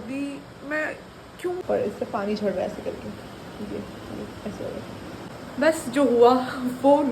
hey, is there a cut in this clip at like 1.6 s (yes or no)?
yes